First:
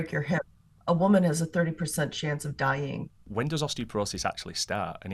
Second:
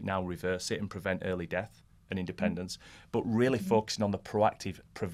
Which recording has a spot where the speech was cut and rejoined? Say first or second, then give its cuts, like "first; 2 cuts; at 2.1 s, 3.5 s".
first; 1 cut; at 3.2 s